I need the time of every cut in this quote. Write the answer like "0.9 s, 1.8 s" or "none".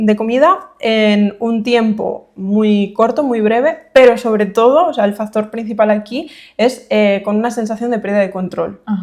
none